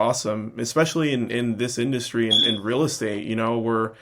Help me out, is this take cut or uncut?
uncut